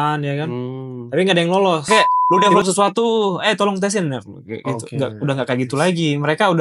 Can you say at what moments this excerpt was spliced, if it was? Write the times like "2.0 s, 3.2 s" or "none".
1.9 s